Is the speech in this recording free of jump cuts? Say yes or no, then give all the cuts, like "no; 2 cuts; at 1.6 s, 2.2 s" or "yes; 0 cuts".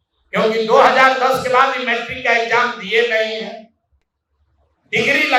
yes; 0 cuts